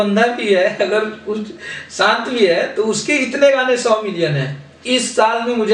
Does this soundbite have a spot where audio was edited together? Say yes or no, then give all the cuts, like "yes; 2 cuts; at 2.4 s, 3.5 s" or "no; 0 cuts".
no; 0 cuts